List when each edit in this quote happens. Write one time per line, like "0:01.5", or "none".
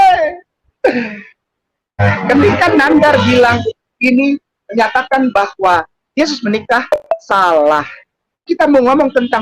0:02.0
0:08.4